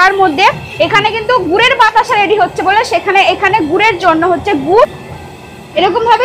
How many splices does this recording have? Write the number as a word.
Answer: one